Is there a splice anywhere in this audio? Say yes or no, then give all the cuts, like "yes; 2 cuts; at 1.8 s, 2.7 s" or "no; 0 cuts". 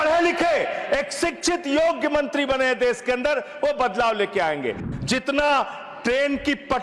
yes; 1 cut; at 4.8 s